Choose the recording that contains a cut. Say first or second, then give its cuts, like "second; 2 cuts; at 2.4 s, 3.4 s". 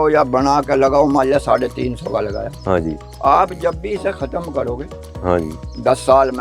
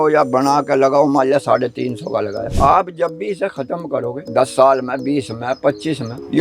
second; 2 cuts; at 2.5 s, 4.2 s